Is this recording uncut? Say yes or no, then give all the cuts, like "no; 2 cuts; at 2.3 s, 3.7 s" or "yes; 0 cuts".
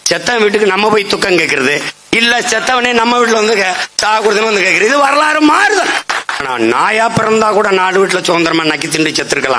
no; 1 cut; at 6.5 s